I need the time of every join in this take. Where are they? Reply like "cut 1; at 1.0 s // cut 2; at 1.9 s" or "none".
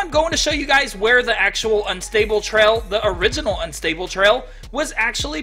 none